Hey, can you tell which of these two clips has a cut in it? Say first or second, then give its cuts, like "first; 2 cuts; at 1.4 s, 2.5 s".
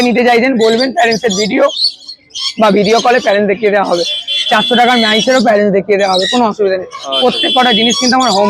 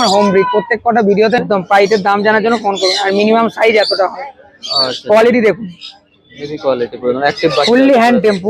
second; 1 cut; at 1.4 s